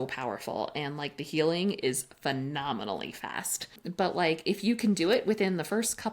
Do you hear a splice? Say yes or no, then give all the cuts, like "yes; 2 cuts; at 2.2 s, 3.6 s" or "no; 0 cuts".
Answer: yes; 1 cut; at 3.7 s